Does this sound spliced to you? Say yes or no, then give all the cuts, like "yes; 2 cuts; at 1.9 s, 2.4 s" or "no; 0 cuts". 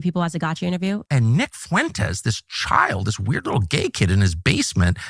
yes; 1 cut; at 1.0 s